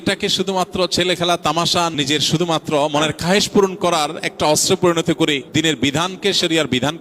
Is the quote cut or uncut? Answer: cut